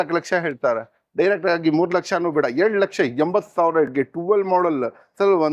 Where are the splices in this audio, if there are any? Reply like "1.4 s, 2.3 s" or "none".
none